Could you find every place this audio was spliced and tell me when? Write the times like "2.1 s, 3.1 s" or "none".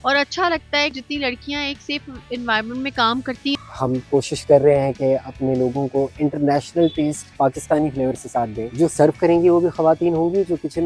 0.9 s, 3.6 s, 7.2 s, 8.7 s